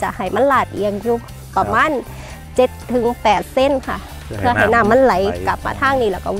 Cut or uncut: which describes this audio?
uncut